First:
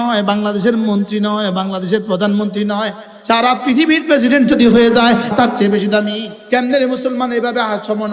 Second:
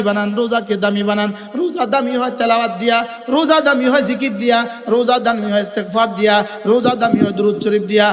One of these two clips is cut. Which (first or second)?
first